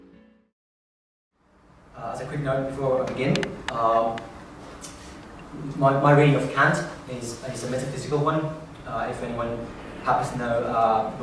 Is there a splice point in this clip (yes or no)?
no